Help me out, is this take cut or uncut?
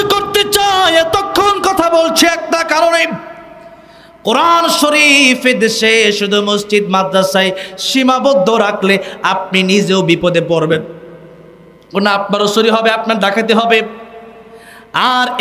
uncut